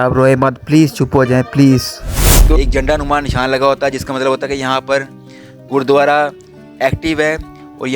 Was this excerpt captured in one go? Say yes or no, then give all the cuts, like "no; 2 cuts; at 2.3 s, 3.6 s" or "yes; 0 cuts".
no; 1 cut; at 2.5 s